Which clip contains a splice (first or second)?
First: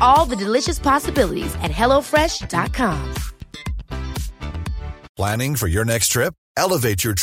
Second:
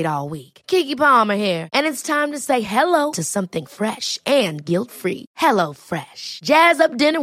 first